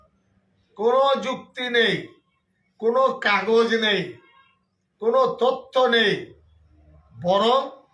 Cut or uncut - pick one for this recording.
uncut